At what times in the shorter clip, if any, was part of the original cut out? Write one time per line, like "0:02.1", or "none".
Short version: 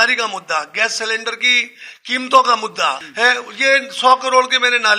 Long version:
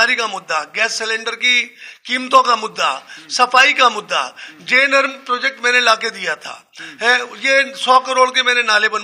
0:03.0